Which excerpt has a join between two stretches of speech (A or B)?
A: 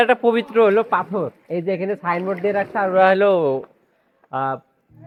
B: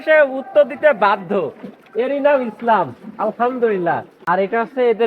B